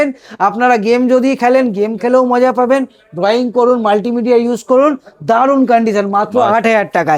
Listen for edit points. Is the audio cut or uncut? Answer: uncut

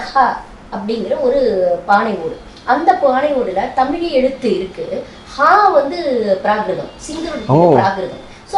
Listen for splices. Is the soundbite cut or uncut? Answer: uncut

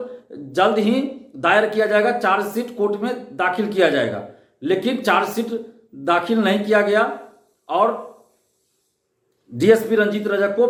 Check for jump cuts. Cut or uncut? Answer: uncut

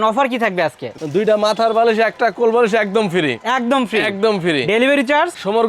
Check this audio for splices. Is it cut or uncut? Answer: cut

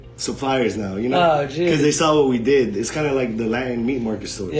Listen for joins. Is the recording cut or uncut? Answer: uncut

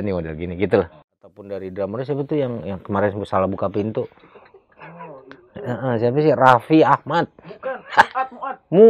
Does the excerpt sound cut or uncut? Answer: cut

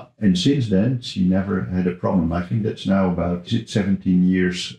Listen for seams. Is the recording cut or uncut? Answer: cut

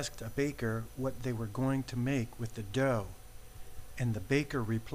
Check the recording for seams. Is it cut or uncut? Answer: uncut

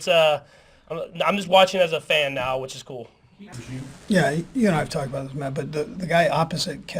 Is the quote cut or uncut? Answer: cut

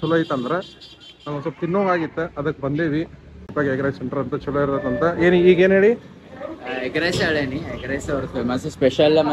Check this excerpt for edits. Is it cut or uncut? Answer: cut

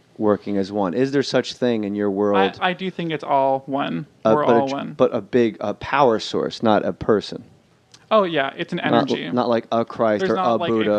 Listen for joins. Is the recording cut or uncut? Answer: uncut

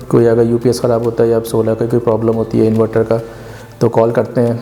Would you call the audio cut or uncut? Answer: uncut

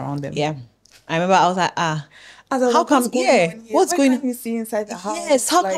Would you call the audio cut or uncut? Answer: uncut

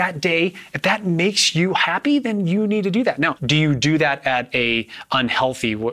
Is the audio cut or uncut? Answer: cut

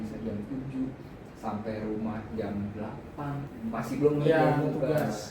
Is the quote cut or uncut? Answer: cut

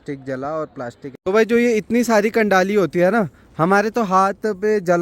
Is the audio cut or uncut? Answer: cut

